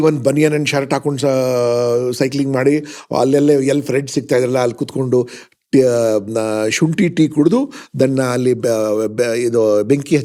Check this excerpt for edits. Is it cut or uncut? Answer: uncut